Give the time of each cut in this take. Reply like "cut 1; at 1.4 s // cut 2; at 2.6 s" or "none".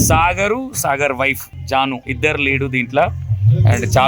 cut 1; at 1.8 s